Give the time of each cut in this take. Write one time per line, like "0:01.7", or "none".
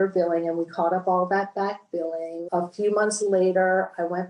0:02.4

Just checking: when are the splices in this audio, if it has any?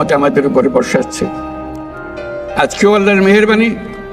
none

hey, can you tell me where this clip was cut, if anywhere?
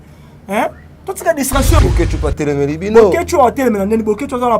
0:01.8

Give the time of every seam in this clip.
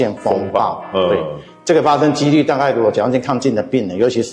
none

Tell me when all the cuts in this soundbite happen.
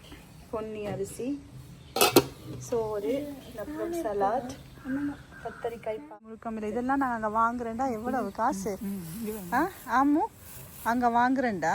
0:06.1

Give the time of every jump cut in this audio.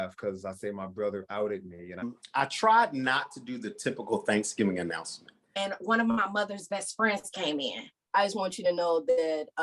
0:02.1
0:05.4
0:07.9

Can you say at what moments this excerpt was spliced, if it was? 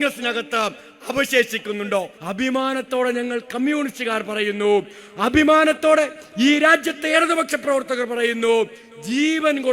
0:02.2

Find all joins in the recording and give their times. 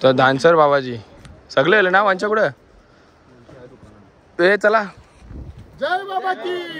none

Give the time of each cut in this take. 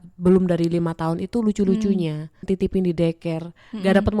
0:02.4

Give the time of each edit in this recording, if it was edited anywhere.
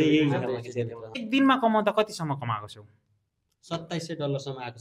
0:01.2

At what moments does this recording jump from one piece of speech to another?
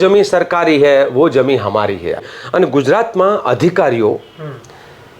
0:02.2

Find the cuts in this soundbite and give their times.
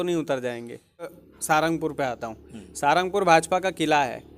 0:01.2

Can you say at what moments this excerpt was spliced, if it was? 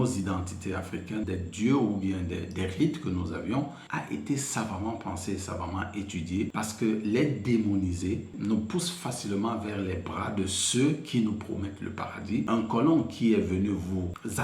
0:01.2
0:03.8
0:06.5
0:12.5

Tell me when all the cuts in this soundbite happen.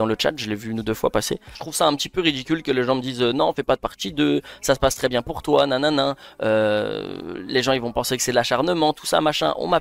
0:01.6

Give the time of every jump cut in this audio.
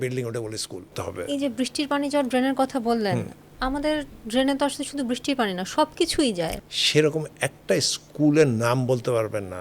0:01.0
0:06.6

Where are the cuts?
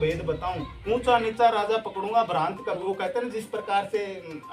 0:02.8

